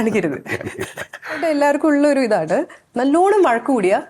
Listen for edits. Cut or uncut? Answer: cut